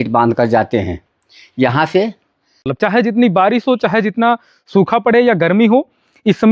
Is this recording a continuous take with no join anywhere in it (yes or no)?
no